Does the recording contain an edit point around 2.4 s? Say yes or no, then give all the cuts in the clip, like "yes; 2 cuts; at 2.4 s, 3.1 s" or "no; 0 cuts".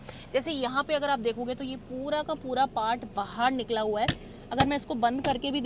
no; 1 cut; at 4.2 s